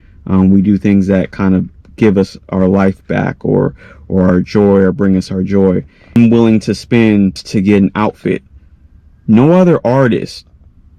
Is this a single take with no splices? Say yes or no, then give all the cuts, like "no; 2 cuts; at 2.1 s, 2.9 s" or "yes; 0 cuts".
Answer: no; 2 cuts; at 6.1 s, 7.4 s